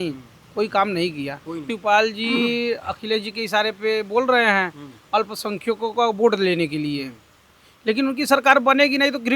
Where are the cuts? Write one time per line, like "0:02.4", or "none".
0:01.7